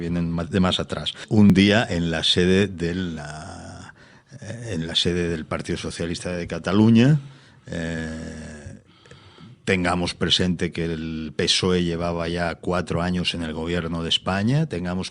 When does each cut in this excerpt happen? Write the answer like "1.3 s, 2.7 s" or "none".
1.5 s

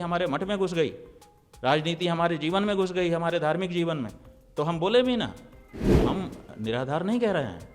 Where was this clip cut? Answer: 6.1 s

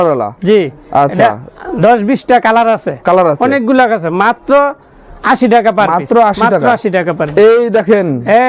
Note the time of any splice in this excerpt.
none

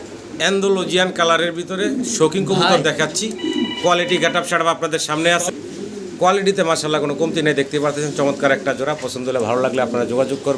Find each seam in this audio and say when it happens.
none

